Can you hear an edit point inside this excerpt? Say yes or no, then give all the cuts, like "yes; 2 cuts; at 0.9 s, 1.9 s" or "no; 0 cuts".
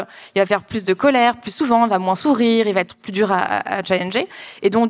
no; 0 cuts